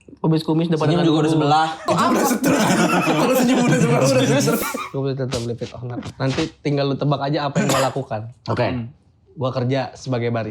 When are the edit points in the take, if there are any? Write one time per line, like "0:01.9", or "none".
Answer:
0:01.8
0:04.6